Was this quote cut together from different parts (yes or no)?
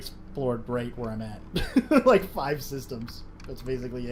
no